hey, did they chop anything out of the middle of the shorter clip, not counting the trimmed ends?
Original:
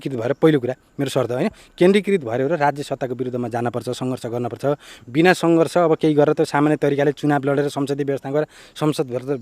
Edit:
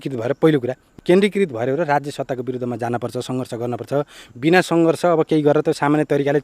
yes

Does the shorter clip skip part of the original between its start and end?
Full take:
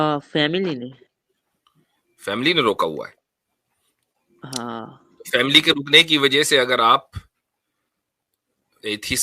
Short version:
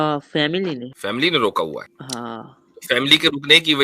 yes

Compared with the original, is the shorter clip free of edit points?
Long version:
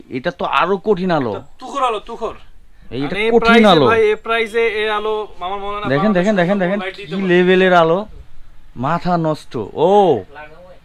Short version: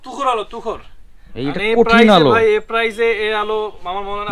yes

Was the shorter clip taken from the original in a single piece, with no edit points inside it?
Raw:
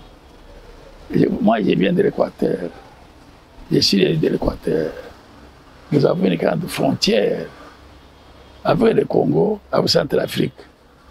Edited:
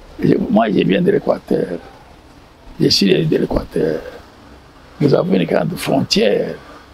yes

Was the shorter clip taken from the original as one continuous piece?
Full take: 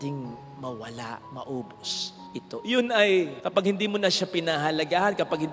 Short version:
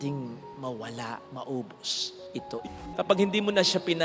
no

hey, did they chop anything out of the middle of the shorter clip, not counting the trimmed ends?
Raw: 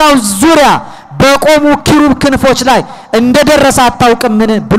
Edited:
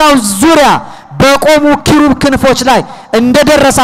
no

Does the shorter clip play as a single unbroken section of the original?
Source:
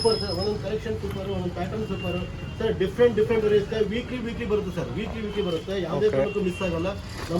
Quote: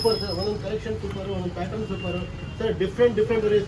yes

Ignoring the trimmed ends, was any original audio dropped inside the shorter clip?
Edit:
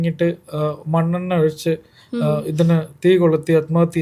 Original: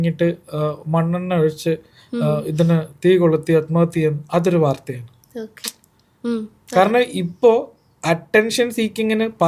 no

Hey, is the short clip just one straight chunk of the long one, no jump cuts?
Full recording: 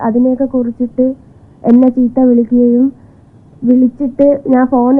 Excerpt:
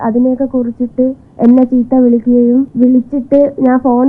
no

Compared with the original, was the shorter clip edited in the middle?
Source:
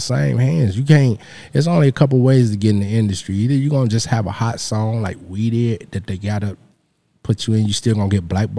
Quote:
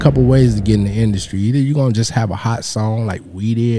no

